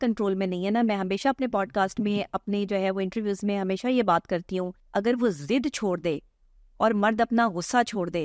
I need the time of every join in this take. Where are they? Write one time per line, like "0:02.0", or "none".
0:04.8